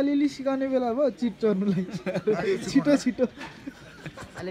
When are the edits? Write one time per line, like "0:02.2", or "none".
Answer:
none